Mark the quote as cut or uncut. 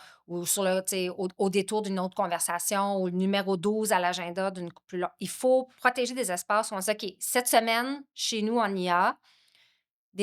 uncut